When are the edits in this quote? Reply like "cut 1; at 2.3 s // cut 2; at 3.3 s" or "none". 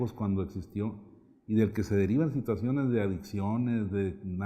cut 1; at 1.8 s